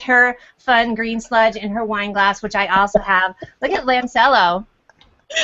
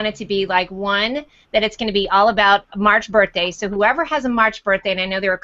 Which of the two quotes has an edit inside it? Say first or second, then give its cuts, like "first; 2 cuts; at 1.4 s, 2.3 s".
first; 1 cut; at 2.8 s